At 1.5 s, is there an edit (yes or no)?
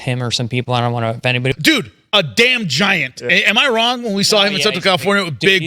yes